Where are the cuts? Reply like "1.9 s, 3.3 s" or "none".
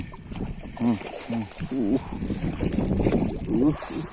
none